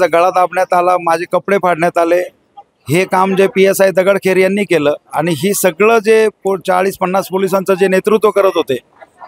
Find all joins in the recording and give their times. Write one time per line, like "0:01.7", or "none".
none